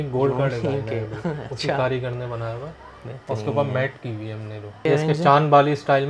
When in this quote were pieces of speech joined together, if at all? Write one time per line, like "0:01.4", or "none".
0:04.9